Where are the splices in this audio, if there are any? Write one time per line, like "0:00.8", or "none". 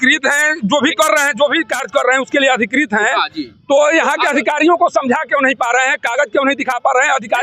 none